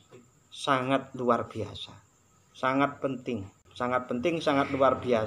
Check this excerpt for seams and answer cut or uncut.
cut